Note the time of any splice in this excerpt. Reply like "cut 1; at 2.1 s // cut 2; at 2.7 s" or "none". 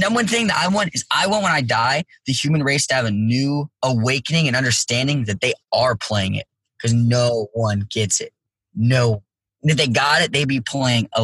cut 1; at 3.7 s